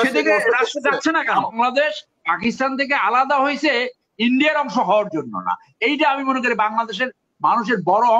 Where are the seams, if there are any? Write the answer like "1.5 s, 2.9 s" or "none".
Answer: 1.5 s

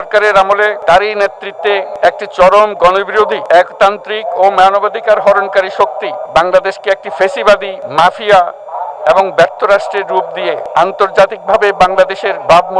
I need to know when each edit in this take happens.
0.8 s, 1.9 s, 3.4 s, 6.2 s, 7.8 s, 10.6 s

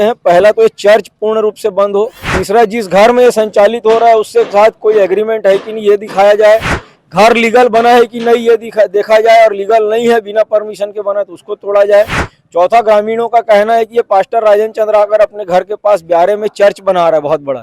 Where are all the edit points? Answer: 2.3 s

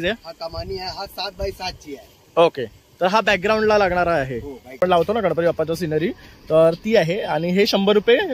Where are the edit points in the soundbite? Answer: 4.8 s

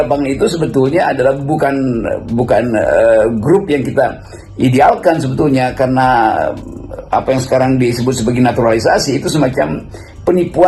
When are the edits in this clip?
none

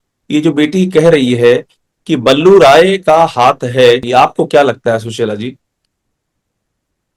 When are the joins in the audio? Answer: none

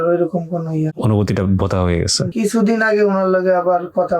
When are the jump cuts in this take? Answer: 2.3 s

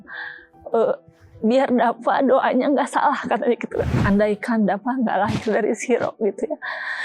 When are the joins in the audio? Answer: 3.9 s

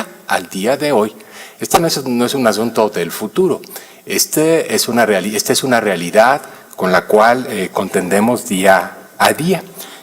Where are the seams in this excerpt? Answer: 1.9 s

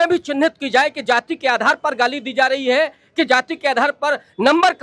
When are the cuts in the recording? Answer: none

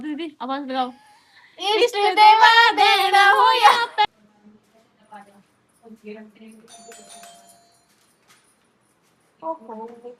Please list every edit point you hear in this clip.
4.0 s

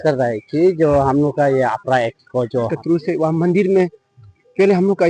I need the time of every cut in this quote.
2.7 s

